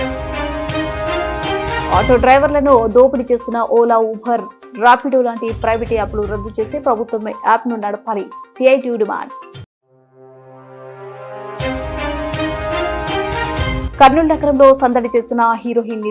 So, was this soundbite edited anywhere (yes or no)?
no